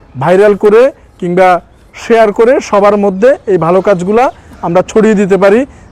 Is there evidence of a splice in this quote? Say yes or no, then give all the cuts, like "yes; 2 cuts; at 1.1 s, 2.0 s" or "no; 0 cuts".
no; 0 cuts